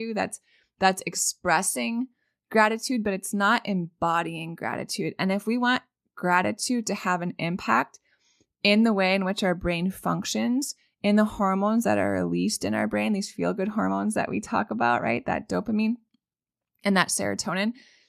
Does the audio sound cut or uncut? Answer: uncut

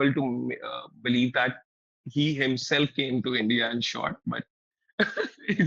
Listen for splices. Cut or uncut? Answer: uncut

